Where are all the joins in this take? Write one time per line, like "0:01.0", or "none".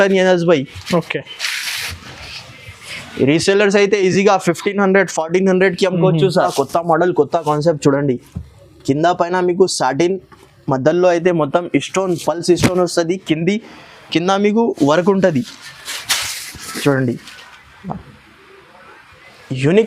0:06.5